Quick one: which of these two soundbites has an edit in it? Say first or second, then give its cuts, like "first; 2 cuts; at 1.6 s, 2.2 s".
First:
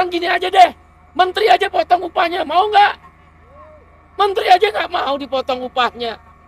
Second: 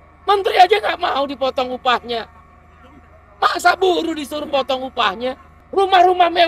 second; 1 cut; at 5.5 s